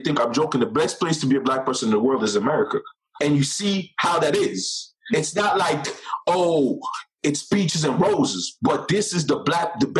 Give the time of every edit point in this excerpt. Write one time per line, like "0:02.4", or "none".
0:03.0
0:05.0